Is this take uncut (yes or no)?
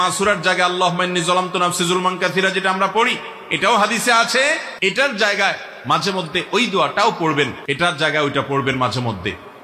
no